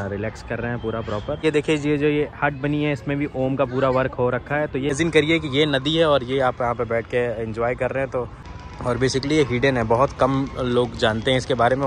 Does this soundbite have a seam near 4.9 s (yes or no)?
yes